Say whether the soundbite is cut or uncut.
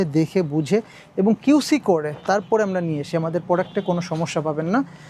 uncut